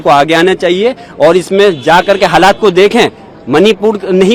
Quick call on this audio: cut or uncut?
uncut